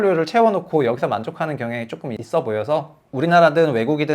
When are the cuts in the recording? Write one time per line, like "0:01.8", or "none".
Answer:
0:02.2
0:03.0

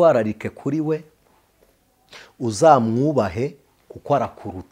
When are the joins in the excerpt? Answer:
none

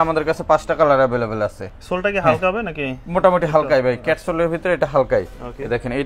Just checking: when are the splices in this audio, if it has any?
none

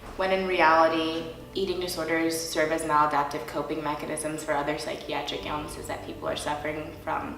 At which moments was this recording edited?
0:01.4

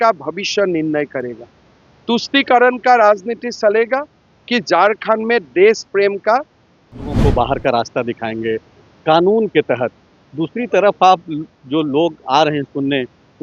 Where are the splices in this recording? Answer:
0:07.2

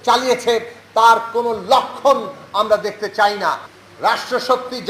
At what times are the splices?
0:03.6

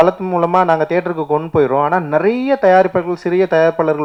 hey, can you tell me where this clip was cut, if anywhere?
none

